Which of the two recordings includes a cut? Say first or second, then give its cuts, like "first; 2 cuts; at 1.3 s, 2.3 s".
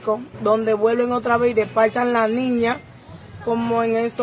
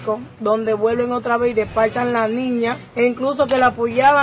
second; 1 cut; at 2.8 s